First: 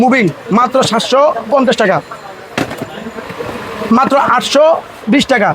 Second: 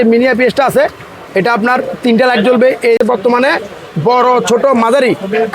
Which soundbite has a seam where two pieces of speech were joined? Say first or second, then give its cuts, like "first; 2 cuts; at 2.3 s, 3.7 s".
second; 1 cut; at 3.0 s